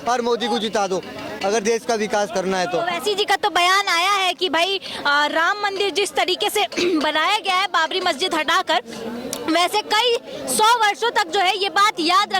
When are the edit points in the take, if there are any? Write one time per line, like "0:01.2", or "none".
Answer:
none